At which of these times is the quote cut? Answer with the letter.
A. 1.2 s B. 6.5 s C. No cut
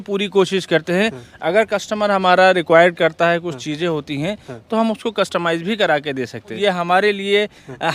B